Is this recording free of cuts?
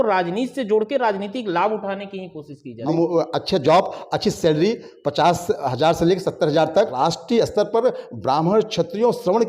no; 2 cuts; at 2.9 s, 6.9 s

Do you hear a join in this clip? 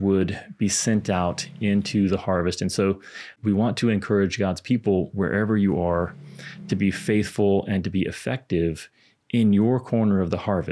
yes; 1 cut; at 3.4 s

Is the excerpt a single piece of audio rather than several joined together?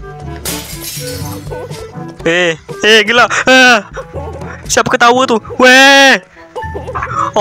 yes; 0 cuts

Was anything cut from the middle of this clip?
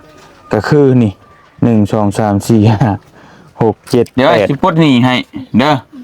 yes; 1 cut; at 4.1 s

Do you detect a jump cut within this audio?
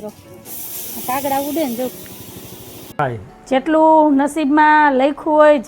yes; 1 cut; at 2.9 s

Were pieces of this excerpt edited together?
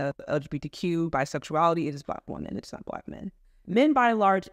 no; 0 cuts

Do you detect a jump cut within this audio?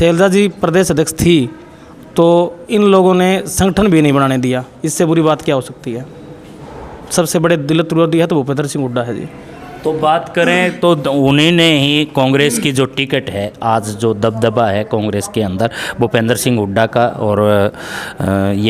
no; 0 cuts

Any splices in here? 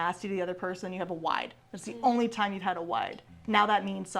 yes; 1 cut; at 3.3 s

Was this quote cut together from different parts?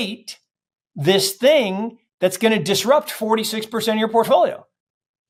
no; 0 cuts

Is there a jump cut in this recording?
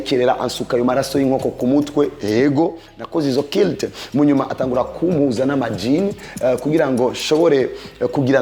no; 0 cuts

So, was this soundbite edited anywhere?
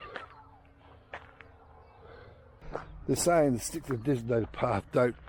yes; 1 cut; at 2.6 s

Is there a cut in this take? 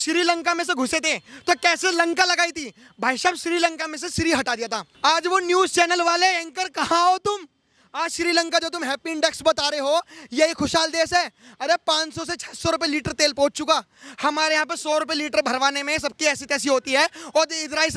yes; 1 cut; at 4.8 s

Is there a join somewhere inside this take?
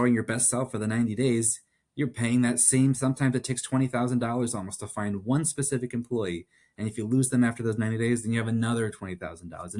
no; 0 cuts

